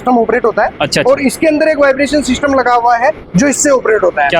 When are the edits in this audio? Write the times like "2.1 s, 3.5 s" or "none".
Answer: none